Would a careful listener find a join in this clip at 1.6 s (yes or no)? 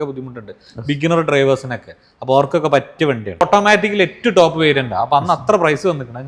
no